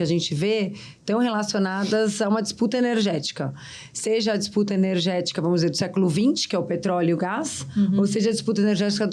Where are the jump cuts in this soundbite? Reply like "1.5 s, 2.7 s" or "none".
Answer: none

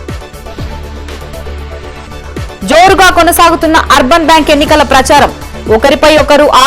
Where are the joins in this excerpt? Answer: 1.0 s

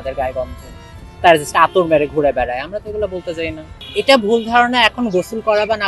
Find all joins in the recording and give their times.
3.7 s

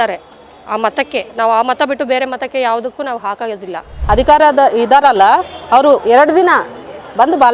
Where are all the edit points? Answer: 3.9 s

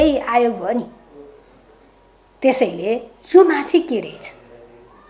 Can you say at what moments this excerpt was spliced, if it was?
none

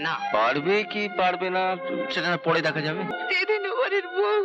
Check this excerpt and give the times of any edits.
3.1 s

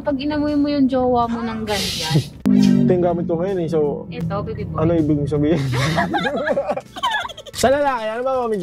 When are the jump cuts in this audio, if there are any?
2.4 s, 7.4 s

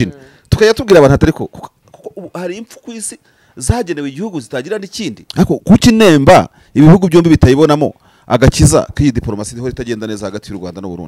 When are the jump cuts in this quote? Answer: 5.2 s

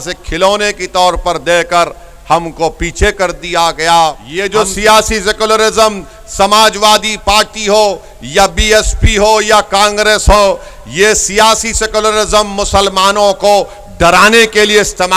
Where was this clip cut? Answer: 4.3 s

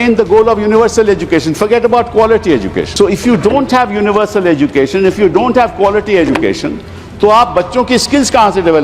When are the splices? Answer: 2.9 s

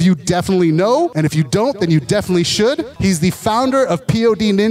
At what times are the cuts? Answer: 1.1 s, 2.9 s

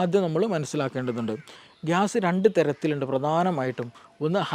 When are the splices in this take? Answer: 1.5 s

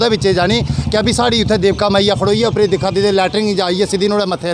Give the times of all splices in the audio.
none

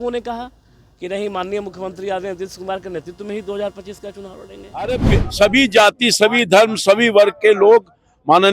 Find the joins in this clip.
4.9 s

